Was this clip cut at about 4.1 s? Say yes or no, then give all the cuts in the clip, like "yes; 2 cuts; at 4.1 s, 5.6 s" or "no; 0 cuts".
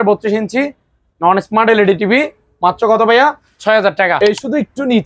yes; 1 cut; at 4.1 s